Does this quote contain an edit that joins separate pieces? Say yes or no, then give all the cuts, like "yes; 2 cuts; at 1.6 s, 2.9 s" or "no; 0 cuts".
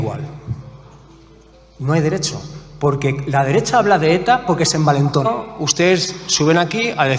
yes; 1 cut; at 5.3 s